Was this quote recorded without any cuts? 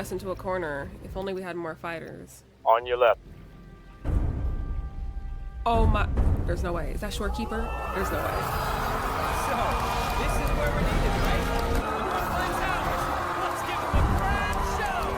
no; 1 cut; at 11.8 s

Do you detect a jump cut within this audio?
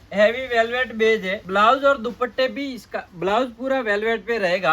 yes; 1 cut; at 1.4 s

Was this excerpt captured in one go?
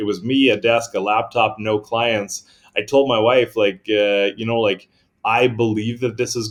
yes; 0 cuts

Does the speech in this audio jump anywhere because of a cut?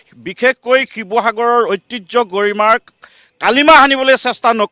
no; 0 cuts

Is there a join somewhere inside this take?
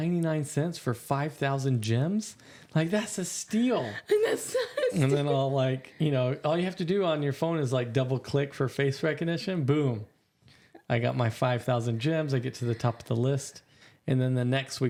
no; 0 cuts

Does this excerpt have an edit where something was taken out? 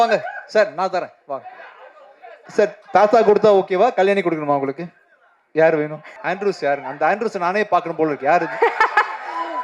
yes; 2 cuts; at 2.3 s, 6.0 s

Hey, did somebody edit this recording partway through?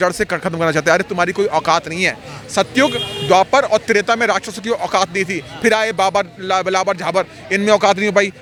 no; 0 cuts

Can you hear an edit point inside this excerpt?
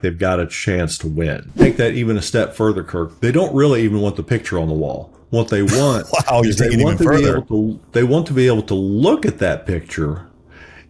yes; 1 cut; at 1.6 s

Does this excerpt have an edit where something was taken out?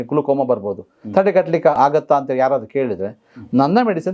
yes; 1 cut; at 1.7 s

